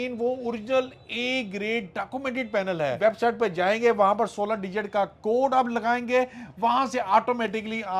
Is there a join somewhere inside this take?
yes; 1 cut; at 3.0 s

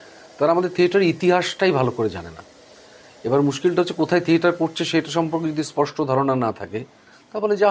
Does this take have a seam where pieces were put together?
no; 0 cuts

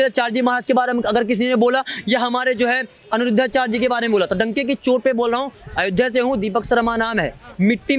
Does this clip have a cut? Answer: no; 0 cuts

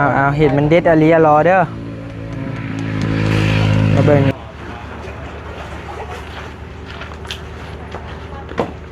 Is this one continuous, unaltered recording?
no; 1 cut; at 4.3 s

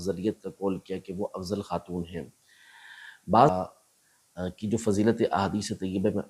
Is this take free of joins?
no; 1 cut; at 3.5 s

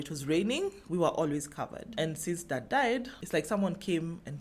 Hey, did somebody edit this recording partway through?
yes; 1 cut; at 3.2 s

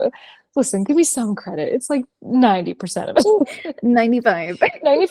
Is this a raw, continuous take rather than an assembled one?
no; 1 cut; at 3.6 s

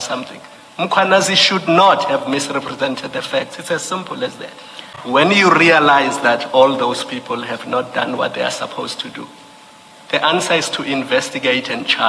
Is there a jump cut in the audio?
yes; 1 cut; at 4.9 s

